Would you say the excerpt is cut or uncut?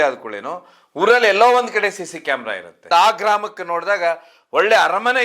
cut